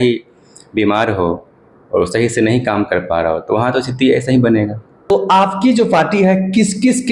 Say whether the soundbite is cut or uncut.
cut